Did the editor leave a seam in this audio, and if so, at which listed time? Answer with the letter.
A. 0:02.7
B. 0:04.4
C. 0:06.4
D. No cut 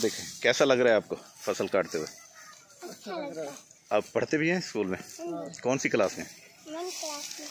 D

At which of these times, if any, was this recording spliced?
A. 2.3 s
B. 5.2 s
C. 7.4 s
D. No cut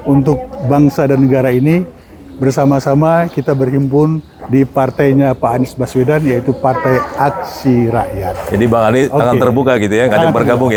D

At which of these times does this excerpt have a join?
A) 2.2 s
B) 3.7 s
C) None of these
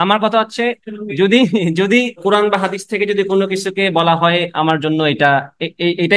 A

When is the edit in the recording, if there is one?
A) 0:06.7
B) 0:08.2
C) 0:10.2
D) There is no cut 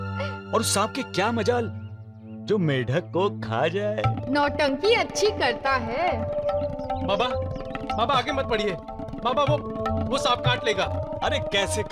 D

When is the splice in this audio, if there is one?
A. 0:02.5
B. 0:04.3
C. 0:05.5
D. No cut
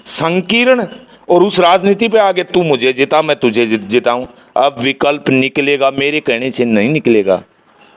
D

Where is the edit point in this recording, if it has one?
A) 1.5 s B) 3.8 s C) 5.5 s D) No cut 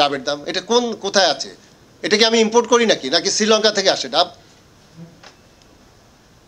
D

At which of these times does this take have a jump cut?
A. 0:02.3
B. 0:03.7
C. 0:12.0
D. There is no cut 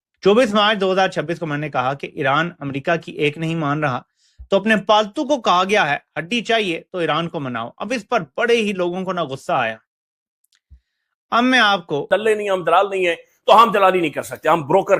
C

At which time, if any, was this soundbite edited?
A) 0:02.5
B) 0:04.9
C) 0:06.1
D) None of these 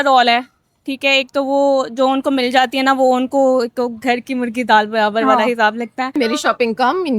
C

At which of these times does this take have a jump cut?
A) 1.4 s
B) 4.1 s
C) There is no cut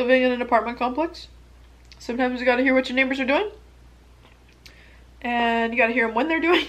C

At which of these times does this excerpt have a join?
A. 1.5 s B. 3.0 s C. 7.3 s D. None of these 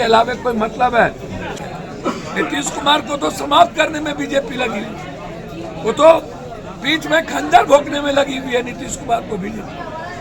A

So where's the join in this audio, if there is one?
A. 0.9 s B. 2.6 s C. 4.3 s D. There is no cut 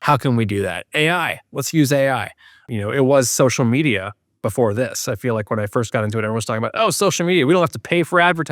B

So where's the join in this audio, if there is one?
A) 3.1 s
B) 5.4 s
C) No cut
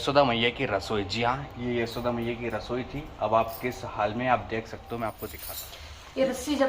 B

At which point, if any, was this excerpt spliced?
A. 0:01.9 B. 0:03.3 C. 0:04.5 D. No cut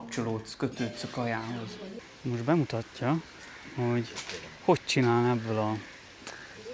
A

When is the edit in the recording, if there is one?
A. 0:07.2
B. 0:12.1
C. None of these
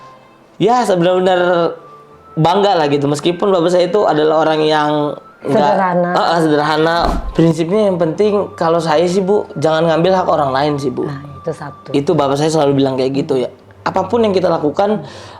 A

